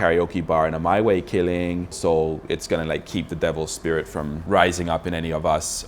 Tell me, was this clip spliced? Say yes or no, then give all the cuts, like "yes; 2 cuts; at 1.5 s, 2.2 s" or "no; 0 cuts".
yes; 1 cut; at 1.9 s